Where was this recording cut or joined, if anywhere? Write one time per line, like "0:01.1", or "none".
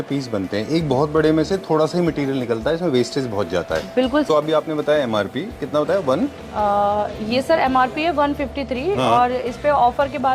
0:04.3

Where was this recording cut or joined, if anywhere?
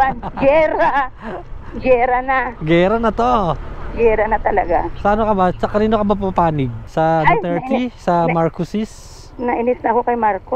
none

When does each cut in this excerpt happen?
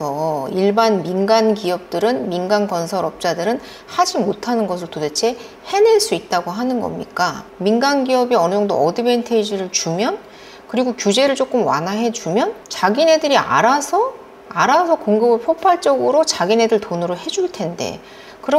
0:07.5

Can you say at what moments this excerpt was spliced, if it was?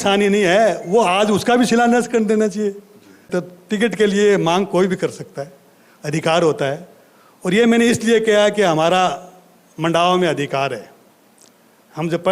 0:03.2

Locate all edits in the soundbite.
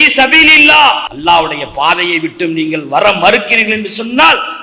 0:01.1

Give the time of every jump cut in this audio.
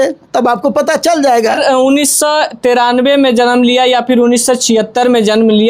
0:01.6

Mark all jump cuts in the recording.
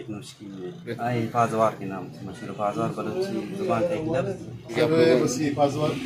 0:00.9
0:04.7

